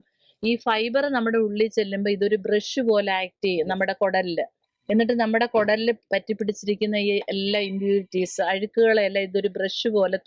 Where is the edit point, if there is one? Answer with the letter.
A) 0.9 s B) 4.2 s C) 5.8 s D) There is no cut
D